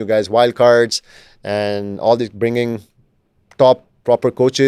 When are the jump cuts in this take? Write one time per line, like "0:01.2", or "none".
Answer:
none